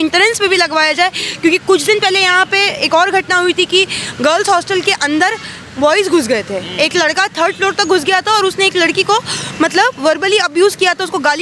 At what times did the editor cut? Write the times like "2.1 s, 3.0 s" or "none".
none